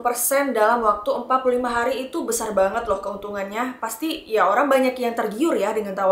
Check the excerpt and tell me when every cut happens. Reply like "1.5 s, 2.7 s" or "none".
none